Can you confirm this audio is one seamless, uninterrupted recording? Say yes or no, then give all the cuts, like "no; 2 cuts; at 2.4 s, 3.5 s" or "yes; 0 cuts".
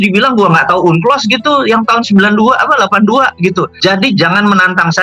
no; 1 cut; at 3.7 s